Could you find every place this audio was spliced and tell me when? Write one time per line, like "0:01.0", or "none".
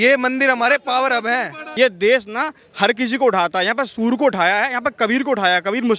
0:01.6